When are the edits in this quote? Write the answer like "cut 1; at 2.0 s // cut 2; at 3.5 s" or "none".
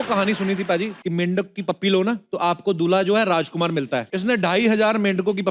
cut 1; at 1.0 s // cut 2; at 2.3 s // cut 3; at 4.1 s